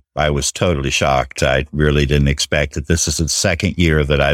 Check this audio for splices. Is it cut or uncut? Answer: uncut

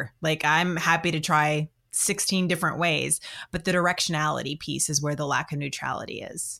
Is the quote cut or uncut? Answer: uncut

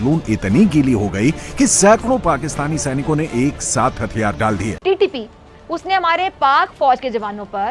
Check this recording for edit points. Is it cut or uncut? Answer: uncut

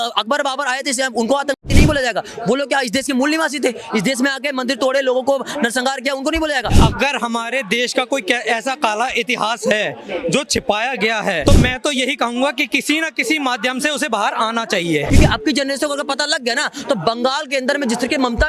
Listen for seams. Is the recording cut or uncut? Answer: cut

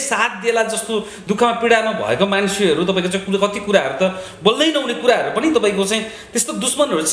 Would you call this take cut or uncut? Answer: uncut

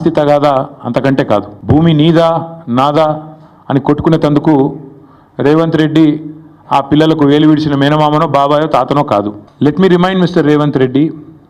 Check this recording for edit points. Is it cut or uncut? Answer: cut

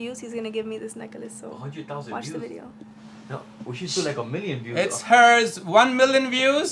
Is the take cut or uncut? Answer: uncut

